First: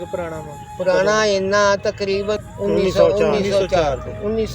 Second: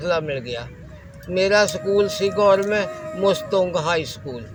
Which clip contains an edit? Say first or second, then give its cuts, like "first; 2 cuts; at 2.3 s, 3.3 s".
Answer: first; 1 cut; at 2.4 s